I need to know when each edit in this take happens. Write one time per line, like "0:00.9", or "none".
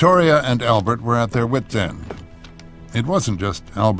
none